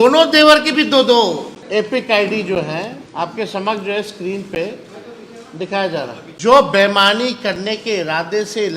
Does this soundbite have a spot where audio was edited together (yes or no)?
yes